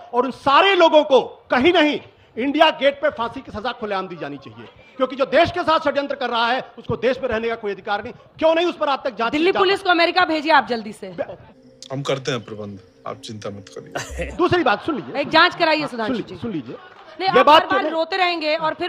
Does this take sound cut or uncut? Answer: uncut